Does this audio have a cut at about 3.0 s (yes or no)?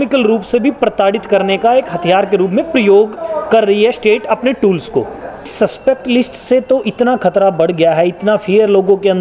no